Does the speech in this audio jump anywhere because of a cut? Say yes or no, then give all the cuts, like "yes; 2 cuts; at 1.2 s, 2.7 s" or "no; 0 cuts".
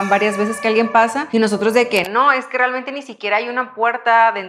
yes; 1 cut; at 1.2 s